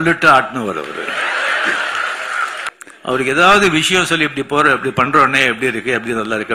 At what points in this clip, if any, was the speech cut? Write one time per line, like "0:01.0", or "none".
0:02.7